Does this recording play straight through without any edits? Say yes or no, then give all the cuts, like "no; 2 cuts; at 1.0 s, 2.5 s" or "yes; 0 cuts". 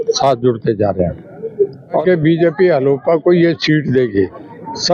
no; 1 cut; at 2.0 s